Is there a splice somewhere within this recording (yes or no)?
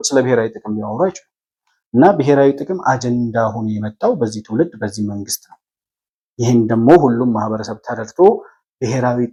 no